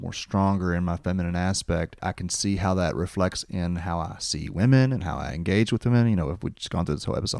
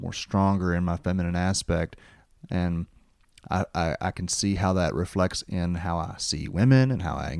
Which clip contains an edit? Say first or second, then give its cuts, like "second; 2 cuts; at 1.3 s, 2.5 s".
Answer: first; 1 cut; at 2.0 s